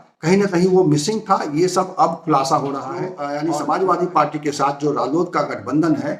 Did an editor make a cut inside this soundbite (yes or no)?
yes